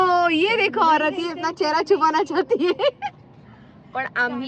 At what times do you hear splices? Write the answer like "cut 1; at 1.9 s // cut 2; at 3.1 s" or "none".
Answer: none